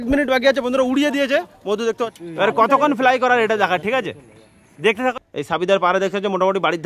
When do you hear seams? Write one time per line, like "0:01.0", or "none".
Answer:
0:02.1
0:05.1